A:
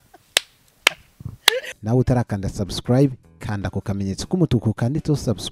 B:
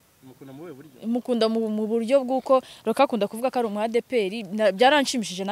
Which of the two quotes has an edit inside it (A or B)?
A